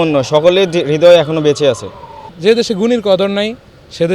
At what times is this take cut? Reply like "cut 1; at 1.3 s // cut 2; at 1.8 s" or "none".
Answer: cut 1; at 2.3 s